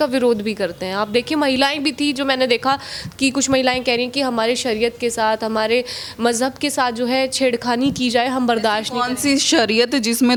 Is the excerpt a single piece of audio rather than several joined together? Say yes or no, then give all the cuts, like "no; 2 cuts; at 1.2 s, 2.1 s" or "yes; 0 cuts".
yes; 0 cuts